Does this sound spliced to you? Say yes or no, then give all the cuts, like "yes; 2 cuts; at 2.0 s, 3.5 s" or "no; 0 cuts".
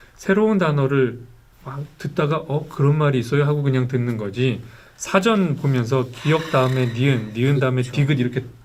no; 0 cuts